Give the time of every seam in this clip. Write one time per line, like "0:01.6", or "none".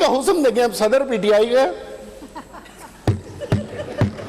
none